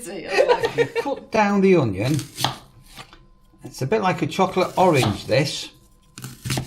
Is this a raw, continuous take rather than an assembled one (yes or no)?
no